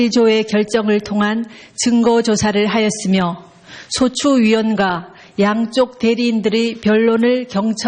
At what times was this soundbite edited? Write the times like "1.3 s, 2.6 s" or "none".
1.4 s